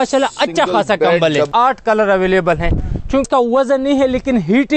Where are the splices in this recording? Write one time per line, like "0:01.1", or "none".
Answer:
0:01.5
0:03.3